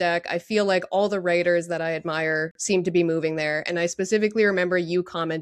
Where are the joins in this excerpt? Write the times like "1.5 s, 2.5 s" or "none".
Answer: none